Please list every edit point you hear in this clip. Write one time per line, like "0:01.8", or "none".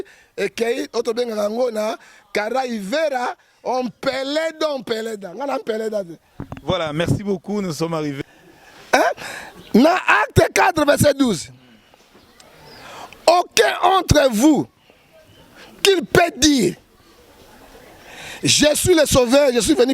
0:08.2